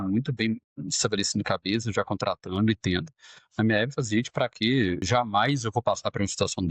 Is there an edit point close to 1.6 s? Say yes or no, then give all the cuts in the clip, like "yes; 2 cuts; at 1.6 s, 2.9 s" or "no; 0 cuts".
no; 1 cut; at 5.0 s